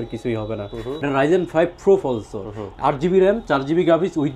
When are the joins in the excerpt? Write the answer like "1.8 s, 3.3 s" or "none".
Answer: 1.0 s